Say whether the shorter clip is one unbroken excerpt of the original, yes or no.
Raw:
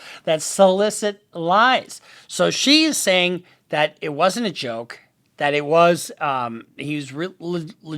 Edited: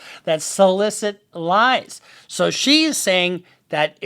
yes